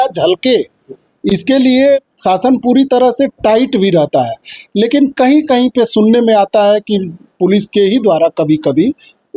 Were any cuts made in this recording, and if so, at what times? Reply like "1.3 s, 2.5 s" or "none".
none